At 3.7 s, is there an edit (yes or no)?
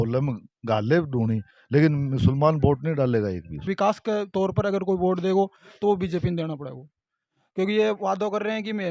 yes